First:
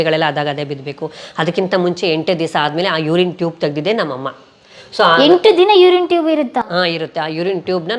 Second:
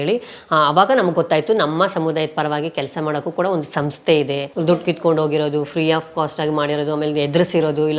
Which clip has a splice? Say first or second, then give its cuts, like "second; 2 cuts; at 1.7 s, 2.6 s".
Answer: second; 1 cut; at 4.5 s